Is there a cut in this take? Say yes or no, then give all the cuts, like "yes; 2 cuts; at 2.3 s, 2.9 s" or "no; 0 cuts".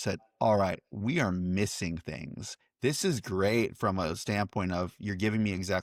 no; 0 cuts